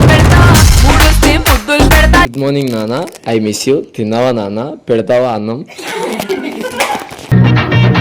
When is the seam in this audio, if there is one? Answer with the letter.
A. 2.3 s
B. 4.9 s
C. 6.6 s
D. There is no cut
A